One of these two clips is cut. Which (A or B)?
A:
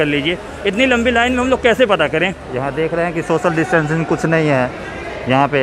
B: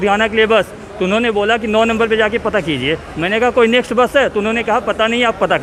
A